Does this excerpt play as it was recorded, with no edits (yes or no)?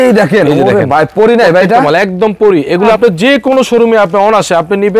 no